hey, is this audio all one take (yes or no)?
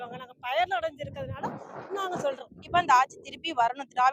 no